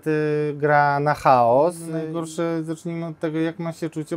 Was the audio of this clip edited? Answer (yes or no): yes